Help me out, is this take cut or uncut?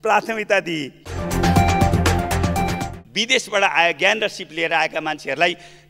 cut